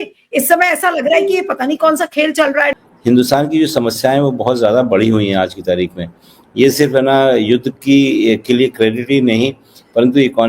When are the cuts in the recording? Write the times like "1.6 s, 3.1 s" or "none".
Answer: 2.9 s